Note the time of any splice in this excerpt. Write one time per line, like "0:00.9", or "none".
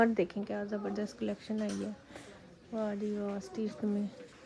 none